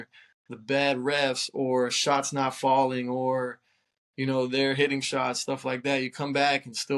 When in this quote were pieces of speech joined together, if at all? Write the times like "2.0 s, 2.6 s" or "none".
none